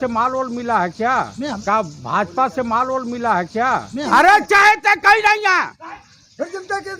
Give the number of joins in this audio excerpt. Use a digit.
2